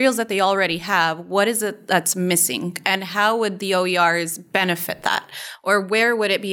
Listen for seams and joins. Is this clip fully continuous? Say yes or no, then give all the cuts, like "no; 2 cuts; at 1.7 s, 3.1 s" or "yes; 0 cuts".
yes; 0 cuts